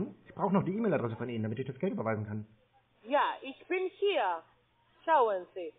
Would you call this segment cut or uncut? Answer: uncut